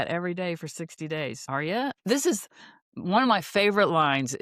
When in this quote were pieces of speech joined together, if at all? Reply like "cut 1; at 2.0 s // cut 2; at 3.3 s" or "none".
cut 1; at 1.9 s